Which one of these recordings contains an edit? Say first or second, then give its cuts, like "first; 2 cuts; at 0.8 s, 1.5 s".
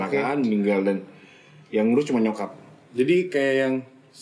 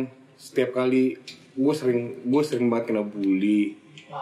first; 1 cut; at 2.8 s